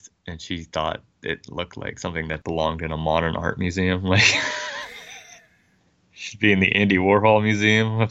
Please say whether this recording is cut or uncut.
cut